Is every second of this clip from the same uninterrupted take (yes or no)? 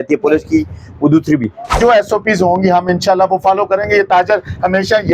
no